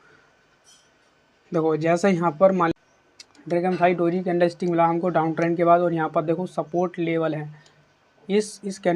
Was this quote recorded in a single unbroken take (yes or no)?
no